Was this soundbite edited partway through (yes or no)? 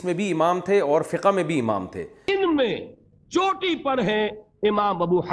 yes